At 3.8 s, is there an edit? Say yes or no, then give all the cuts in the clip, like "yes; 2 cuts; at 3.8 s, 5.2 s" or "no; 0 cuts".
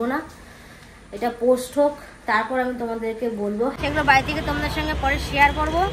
yes; 1 cut; at 3.8 s